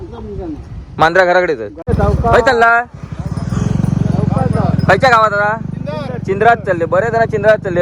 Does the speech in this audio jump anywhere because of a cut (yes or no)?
yes